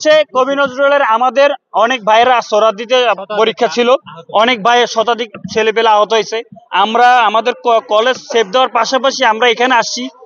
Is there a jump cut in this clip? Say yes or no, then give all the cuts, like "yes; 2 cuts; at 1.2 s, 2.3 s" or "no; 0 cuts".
no; 0 cuts